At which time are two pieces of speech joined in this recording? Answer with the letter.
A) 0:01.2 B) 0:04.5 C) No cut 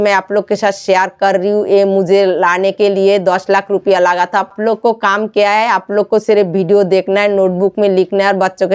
B